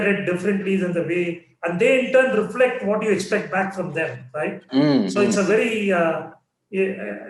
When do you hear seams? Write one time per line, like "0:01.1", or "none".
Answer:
none